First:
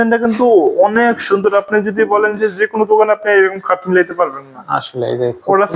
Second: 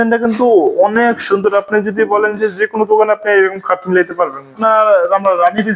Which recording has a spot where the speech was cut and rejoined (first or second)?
second